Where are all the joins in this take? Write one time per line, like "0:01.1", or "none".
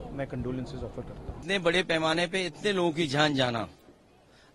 0:01.4